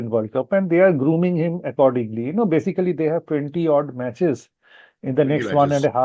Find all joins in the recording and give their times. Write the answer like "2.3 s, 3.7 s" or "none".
none